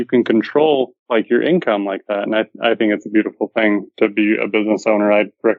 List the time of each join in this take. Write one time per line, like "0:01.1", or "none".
0:01.0